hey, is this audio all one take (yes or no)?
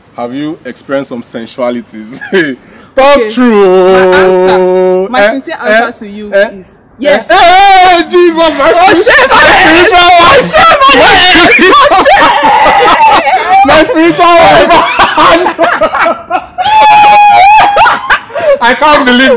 yes